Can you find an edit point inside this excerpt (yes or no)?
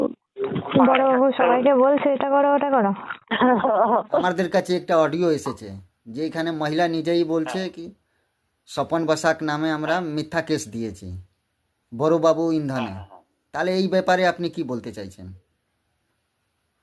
yes